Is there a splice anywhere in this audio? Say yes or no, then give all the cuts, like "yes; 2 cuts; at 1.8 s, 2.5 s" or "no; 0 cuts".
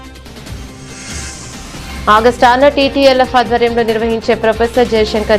yes; 1 cut; at 1.6 s